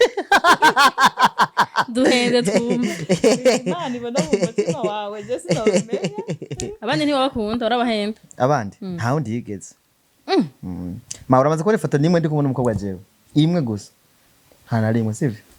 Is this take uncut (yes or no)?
yes